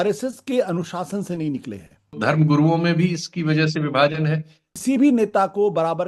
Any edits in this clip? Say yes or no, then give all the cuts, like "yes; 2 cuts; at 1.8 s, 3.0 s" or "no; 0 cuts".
yes; 2 cuts; at 2.2 s, 4.7 s